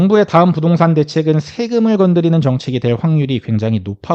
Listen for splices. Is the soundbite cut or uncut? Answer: uncut